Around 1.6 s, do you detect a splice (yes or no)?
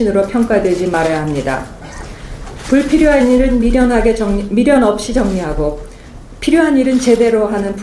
yes